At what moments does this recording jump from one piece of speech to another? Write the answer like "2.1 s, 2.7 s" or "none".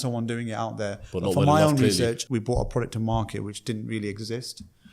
2.2 s